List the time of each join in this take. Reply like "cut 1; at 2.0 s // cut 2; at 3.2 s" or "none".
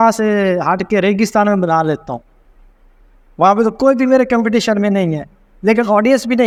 none